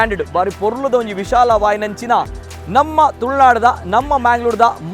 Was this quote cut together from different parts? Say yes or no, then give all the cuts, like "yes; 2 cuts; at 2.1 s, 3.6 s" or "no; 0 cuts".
no; 0 cuts